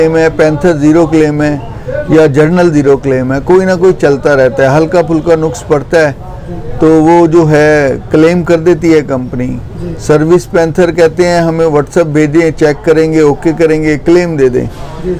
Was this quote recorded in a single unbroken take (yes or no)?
yes